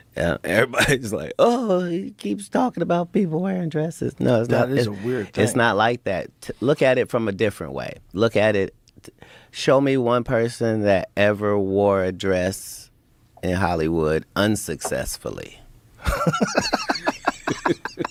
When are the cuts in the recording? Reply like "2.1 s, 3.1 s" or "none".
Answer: none

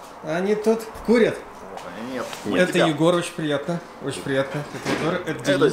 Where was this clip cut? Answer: none

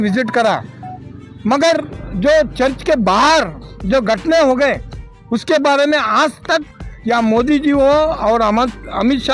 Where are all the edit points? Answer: none

